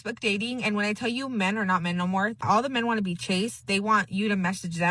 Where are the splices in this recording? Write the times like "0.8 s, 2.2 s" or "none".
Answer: 2.4 s